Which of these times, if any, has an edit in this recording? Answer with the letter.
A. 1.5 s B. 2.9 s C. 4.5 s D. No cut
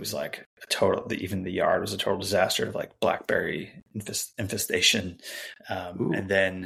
D